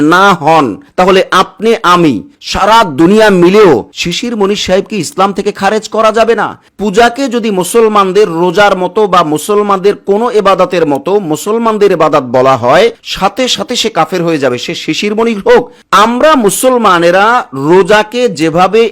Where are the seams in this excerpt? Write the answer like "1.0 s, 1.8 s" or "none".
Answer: 6.7 s, 15.8 s